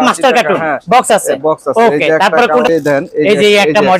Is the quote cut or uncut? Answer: uncut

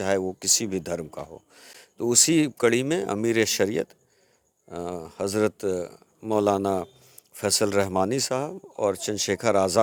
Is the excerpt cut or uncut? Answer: uncut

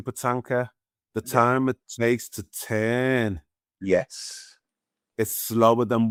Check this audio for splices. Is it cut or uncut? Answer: uncut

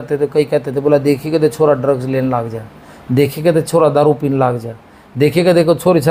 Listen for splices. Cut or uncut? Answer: uncut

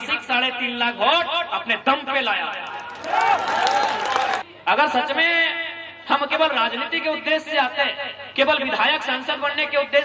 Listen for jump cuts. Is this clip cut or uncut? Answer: cut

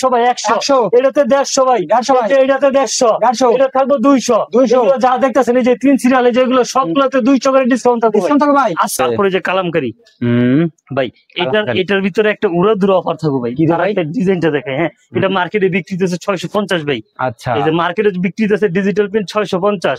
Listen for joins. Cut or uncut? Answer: cut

